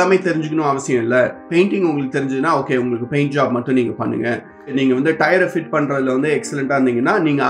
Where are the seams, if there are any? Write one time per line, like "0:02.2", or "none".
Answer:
none